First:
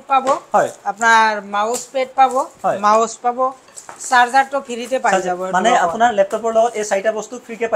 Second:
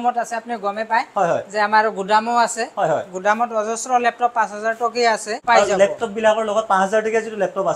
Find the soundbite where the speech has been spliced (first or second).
second